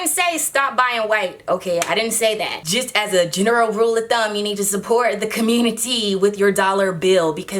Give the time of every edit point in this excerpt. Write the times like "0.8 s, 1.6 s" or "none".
2.6 s